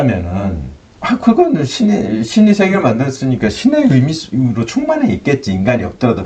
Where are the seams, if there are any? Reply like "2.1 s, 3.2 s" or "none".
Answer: none

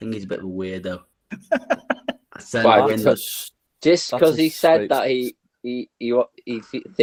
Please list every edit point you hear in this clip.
none

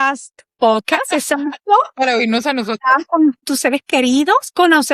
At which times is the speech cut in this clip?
3.5 s

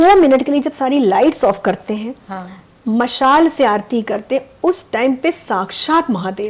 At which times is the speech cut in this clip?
none

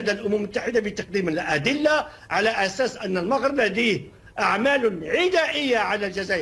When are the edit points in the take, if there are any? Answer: none

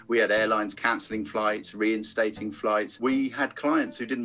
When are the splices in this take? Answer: 2.9 s

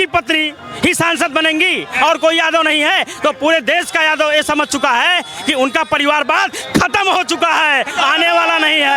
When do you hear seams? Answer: none

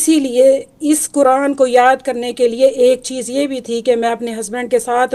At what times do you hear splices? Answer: none

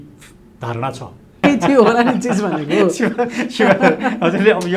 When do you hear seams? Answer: 1.4 s

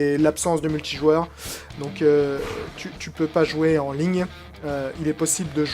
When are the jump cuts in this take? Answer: 3.2 s

